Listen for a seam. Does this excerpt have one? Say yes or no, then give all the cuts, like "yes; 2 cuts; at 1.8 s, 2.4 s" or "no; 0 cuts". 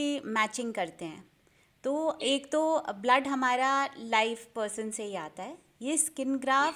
no; 0 cuts